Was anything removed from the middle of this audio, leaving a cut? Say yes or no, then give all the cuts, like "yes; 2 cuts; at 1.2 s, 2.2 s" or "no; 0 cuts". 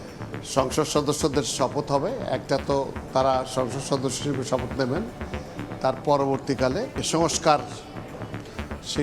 yes; 1 cut; at 7.0 s